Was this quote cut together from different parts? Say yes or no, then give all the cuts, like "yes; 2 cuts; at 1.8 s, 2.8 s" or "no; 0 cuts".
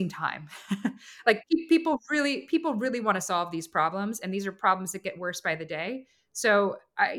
no; 0 cuts